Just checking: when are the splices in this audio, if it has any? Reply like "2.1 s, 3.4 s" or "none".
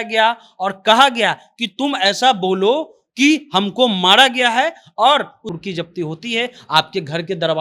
5.5 s